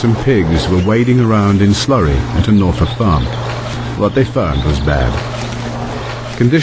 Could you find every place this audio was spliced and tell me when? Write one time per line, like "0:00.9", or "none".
0:01.8